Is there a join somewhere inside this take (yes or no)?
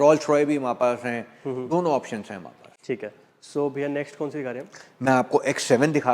no